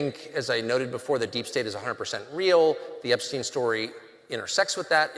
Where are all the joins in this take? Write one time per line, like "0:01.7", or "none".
none